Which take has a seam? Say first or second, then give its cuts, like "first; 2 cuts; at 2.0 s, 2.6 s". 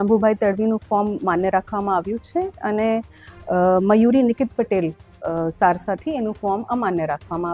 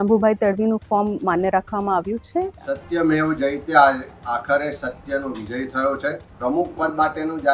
second; 2 cuts; at 2.5 s, 6.3 s